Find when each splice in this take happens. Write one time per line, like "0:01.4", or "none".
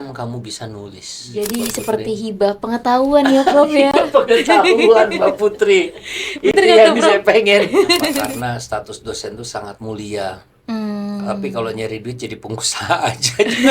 0:01.3
0:08.2